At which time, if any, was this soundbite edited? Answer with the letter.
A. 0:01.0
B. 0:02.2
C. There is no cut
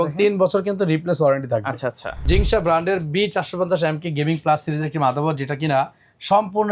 B